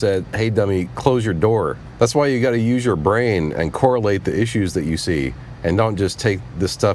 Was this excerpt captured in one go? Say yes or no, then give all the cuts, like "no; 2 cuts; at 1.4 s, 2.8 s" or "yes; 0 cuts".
yes; 0 cuts